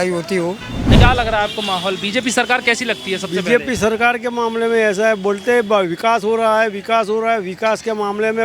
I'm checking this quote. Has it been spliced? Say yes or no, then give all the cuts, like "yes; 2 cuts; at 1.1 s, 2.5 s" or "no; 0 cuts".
yes; 1 cut; at 0.9 s